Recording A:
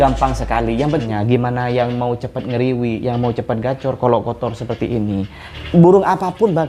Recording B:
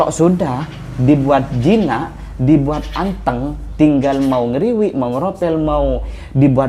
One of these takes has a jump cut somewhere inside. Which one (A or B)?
A